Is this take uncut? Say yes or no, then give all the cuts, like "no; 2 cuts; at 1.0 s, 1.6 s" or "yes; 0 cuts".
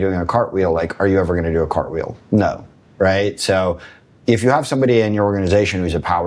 yes; 0 cuts